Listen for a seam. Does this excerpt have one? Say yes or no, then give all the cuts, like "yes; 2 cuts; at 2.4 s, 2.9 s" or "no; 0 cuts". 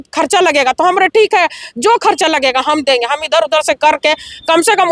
no; 0 cuts